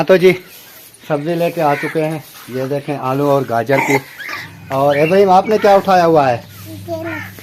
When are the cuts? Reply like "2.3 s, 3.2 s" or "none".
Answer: none